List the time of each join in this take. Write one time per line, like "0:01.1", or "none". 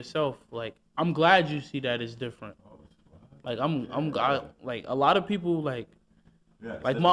none